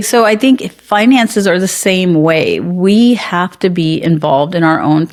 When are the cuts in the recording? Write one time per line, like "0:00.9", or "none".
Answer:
none